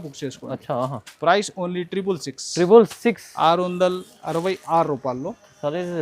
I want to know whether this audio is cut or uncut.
uncut